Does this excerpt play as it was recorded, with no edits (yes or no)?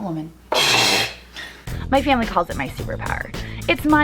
no